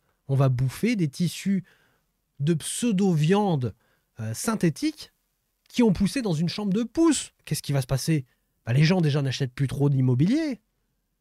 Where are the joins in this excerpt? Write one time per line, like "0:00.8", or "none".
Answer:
0:07.4